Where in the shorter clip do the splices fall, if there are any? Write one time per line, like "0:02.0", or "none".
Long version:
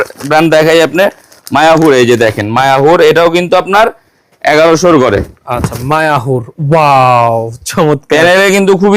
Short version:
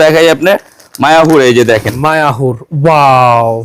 0:01.9